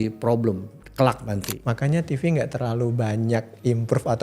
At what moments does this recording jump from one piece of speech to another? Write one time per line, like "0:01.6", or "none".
0:01.6